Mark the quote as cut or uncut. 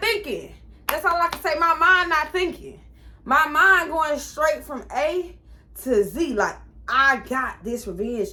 uncut